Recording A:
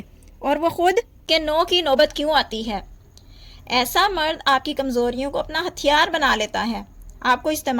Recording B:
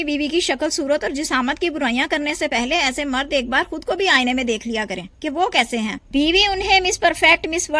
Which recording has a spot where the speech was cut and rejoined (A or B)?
A